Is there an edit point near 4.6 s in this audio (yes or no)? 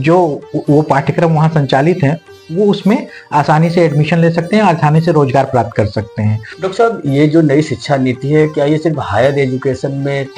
no